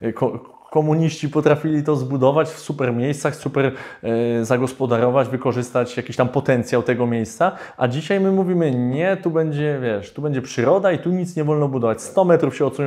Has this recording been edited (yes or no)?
no